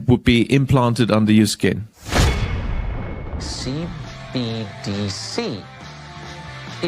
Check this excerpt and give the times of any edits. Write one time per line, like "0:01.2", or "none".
0:01.9
0:03.4